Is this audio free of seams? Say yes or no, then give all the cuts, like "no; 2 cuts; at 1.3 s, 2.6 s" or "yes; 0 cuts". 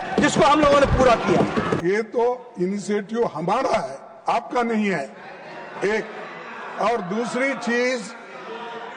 no; 1 cut; at 1.8 s